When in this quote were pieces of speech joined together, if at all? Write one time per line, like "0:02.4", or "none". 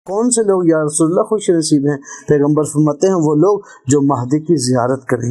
none